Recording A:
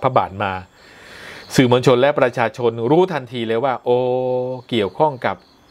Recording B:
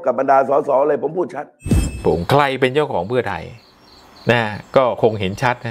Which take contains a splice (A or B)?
B